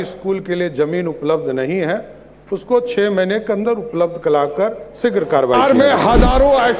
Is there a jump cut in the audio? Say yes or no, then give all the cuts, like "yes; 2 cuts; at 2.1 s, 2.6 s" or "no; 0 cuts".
yes; 1 cut; at 5.6 s